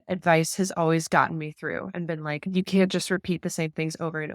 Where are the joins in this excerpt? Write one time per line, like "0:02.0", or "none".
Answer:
0:02.5